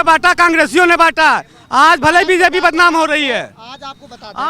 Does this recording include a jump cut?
no; 0 cuts

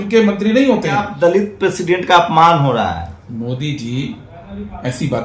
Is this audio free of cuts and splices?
no; 1 cut; at 1.1 s

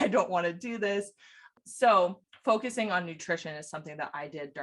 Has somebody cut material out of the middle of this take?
yes; 2 cuts; at 1.5 s, 2.3 s

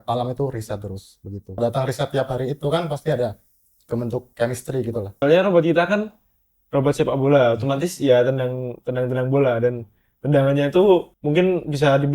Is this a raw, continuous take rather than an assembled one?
no; 3 cuts; at 1.6 s, 5.1 s, 11.2 s

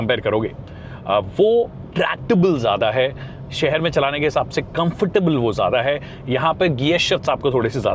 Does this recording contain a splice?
no; 0 cuts

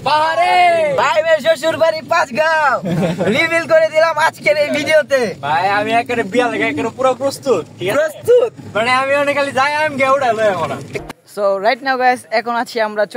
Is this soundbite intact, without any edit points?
no; 3 cuts; at 1.0 s, 5.4 s, 10.9 s

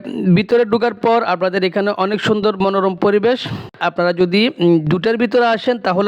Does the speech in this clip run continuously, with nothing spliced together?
no; 1 cut; at 3.8 s

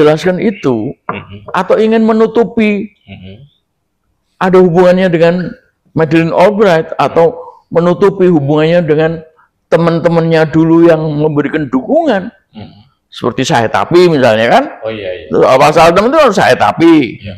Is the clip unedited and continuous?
yes; 0 cuts

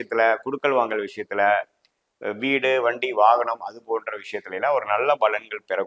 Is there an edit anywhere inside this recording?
no; 0 cuts

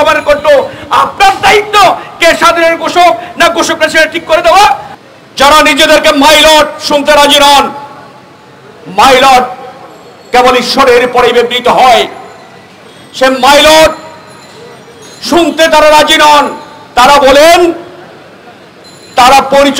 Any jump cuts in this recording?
yes; 1 cut; at 4.9 s

